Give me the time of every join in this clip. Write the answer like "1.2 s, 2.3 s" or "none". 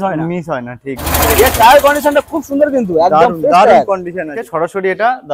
1.0 s, 4.4 s